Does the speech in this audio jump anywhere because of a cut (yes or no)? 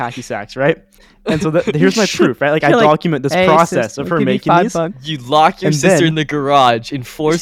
no